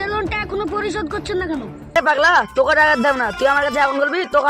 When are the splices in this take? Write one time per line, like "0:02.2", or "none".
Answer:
0:02.0

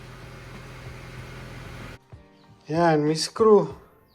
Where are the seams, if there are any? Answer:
0:01.9

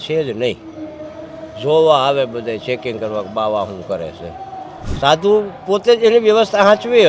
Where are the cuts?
0:04.8

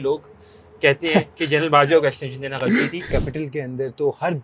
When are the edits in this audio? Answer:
0:03.0

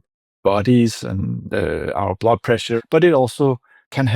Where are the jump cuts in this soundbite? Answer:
0:02.7

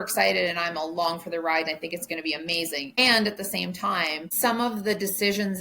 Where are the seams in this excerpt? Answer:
0:03.0
0:04.2

